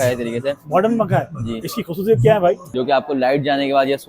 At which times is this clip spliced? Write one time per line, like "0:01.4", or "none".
0:02.7